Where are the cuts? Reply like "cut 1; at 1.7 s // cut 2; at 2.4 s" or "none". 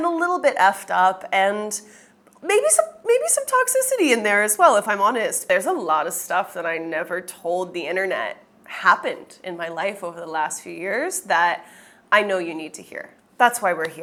none